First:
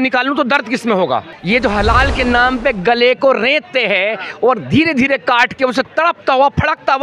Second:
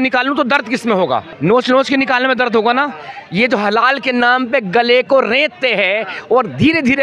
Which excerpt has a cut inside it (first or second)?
first